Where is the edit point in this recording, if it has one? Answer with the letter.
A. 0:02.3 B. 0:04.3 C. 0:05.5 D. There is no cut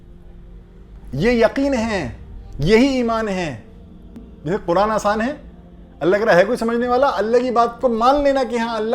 B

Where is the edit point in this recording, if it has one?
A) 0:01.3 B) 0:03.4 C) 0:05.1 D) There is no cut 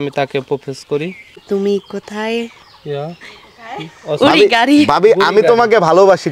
A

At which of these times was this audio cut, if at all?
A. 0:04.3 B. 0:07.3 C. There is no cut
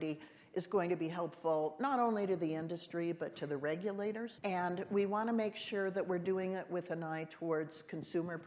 A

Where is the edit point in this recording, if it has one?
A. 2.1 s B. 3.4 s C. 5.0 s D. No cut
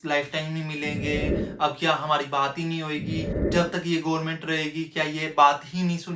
B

